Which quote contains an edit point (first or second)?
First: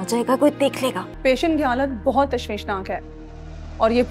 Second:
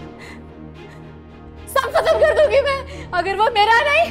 first